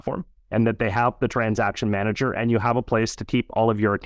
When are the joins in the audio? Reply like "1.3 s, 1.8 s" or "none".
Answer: none